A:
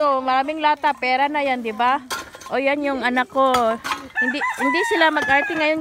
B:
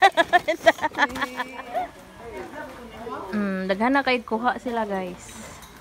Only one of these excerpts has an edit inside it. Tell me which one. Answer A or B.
B